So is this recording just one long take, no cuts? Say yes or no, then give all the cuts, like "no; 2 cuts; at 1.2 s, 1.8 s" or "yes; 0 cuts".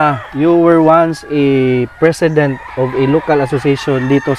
yes; 0 cuts